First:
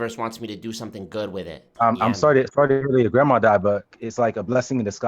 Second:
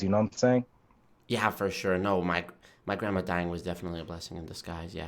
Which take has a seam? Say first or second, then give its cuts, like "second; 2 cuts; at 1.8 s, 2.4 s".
first; 1 cut; at 3.9 s